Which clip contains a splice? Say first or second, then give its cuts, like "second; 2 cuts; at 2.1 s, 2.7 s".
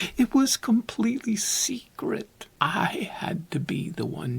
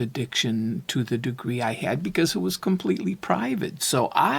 first; 1 cut; at 2.4 s